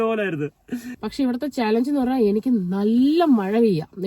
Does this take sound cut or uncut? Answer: cut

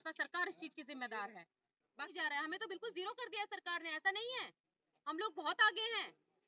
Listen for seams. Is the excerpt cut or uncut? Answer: cut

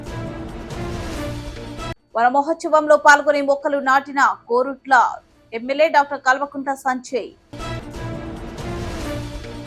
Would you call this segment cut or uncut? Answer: uncut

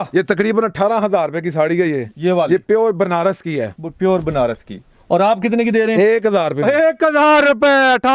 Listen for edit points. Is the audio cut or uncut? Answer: uncut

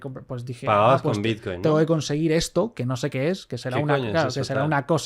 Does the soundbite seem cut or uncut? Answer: uncut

